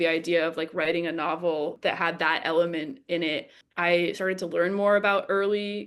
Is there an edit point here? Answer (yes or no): yes